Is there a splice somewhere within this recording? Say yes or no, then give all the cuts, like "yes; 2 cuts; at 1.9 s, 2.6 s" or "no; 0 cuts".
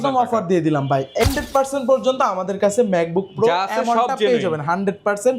yes; 1 cut; at 1.2 s